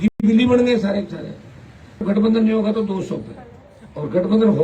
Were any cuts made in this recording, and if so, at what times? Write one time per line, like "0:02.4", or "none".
0:02.0